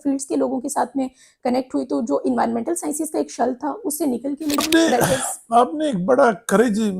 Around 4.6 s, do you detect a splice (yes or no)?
yes